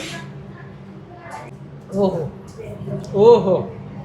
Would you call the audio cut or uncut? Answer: cut